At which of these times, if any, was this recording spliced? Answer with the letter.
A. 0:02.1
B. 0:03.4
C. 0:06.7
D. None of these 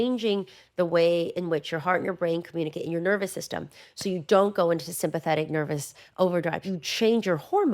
C